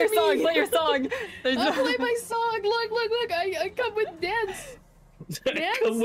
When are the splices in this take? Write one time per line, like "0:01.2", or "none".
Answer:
none